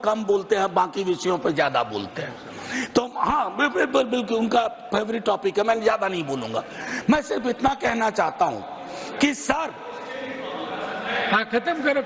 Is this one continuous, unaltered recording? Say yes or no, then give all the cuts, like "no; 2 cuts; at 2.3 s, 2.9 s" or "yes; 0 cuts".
yes; 0 cuts